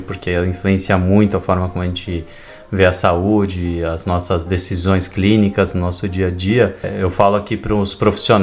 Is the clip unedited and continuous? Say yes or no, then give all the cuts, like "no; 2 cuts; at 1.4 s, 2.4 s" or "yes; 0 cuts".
yes; 0 cuts